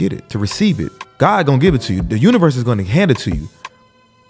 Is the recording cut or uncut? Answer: cut